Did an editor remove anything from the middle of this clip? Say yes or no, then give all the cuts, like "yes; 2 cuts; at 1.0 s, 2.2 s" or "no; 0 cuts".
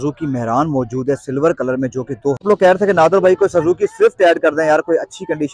yes; 1 cut; at 2.4 s